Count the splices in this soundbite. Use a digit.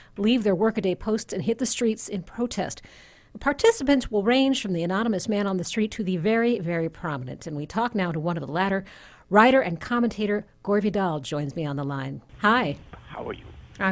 1